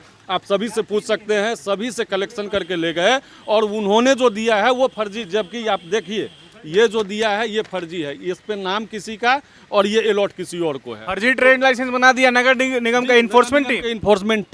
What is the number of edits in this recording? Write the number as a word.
zero